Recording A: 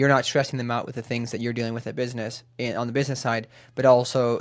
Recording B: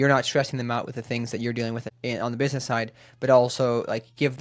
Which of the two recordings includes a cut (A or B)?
B